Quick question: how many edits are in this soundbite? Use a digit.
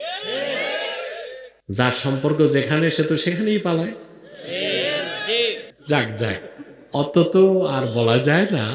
2